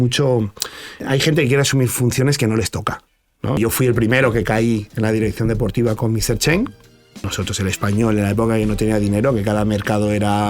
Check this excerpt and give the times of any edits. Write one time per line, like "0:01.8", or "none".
0:01.0
0:03.6
0:07.3